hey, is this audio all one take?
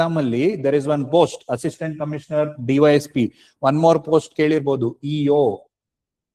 yes; 0 cuts

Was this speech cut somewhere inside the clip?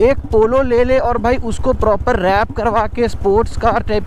no; 0 cuts

